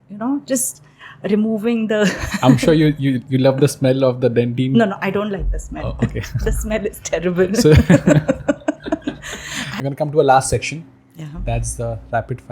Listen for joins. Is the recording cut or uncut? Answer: cut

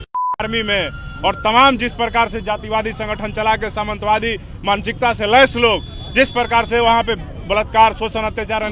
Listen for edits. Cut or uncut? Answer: uncut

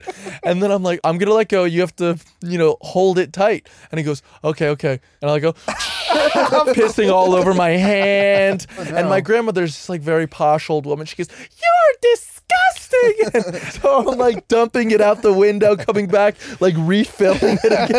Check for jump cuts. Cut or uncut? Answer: cut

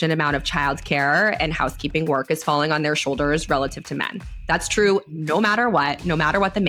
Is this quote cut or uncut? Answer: uncut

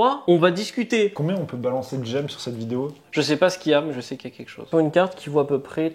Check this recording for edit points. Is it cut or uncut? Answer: cut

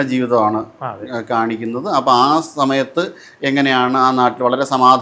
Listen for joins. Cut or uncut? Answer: uncut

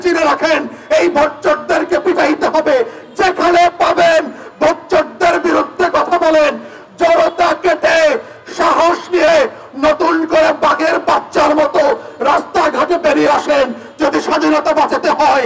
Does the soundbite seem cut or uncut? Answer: uncut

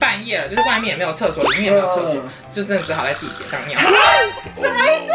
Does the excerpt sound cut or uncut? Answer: uncut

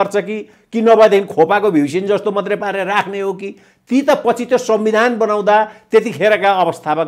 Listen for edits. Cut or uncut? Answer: uncut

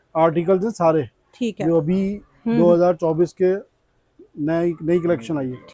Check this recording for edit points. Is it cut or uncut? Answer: uncut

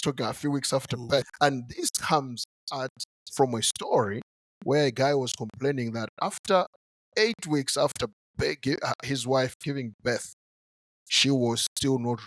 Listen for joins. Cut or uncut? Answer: cut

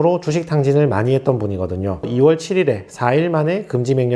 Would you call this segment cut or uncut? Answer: cut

